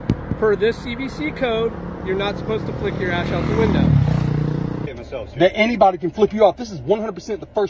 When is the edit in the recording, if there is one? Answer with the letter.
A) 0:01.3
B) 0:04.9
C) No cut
B